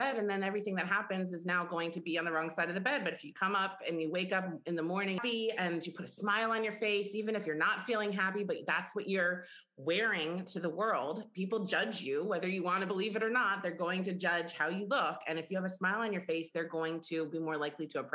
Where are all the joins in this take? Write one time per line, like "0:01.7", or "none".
0:05.2